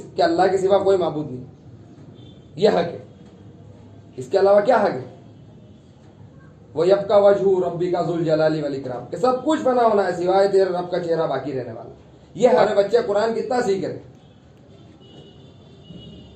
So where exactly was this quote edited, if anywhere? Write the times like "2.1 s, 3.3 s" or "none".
12.6 s